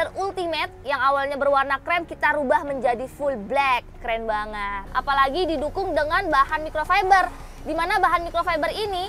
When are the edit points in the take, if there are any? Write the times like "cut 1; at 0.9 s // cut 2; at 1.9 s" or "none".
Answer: cut 1; at 4.8 s